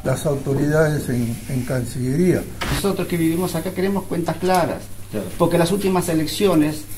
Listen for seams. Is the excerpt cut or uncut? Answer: cut